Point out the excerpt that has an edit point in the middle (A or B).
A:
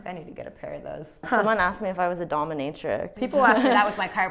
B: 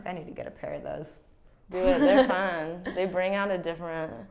A